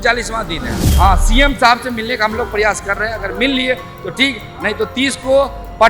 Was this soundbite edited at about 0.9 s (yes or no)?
yes